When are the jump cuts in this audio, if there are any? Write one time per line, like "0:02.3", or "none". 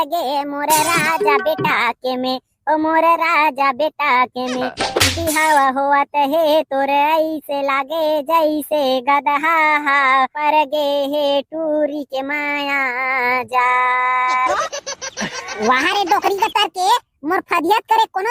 none